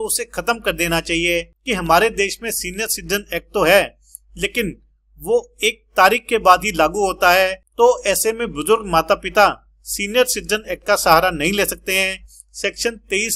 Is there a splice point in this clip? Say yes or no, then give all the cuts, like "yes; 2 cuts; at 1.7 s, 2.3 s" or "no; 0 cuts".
yes; 2 cuts; at 1.6 s, 7.6 s